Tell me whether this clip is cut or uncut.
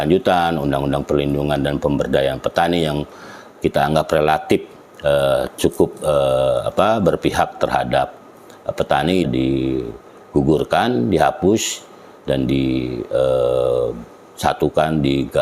cut